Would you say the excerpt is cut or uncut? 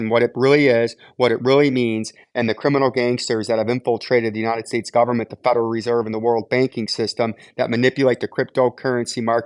uncut